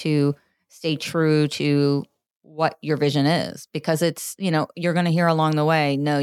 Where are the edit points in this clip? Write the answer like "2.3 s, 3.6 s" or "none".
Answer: none